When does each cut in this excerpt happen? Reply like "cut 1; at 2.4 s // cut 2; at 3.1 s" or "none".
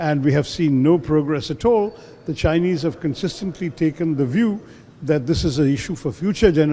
none